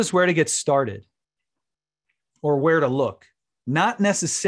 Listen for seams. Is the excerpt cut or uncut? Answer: uncut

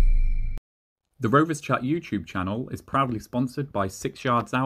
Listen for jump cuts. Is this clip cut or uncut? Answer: cut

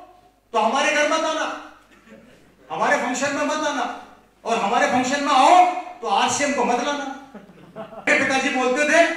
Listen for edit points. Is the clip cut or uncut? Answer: cut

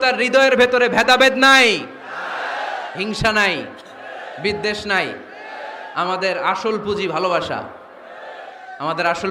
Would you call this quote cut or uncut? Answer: uncut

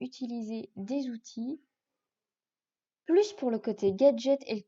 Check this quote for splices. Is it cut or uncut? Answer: uncut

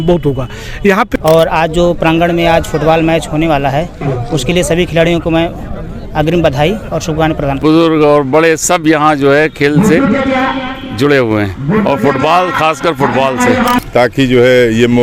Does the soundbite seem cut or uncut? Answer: cut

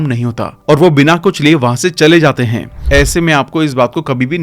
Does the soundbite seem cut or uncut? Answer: cut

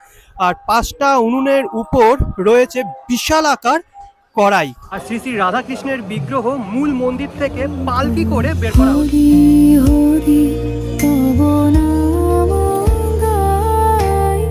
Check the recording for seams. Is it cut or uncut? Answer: cut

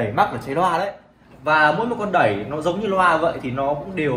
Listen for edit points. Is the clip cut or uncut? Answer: cut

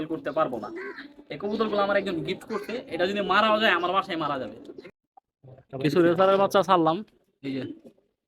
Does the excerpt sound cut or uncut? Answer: cut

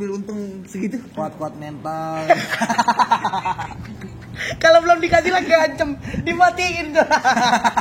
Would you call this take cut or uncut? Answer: cut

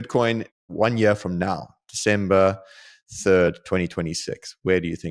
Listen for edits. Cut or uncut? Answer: uncut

